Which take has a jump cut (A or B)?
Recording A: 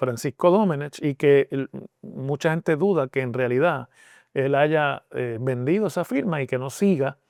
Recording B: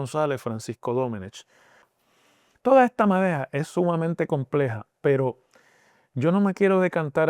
B